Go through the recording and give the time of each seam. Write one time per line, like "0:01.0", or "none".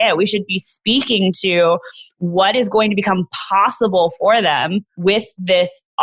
0:04.9